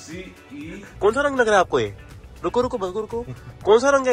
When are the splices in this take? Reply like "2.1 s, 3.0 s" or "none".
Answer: 0.9 s